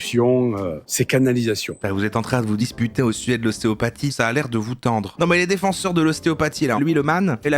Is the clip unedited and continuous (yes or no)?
no